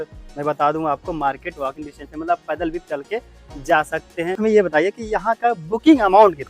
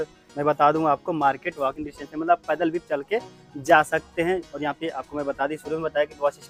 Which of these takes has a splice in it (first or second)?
first